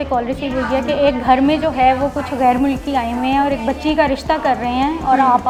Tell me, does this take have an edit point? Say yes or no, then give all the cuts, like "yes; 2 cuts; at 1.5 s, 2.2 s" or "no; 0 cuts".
no; 0 cuts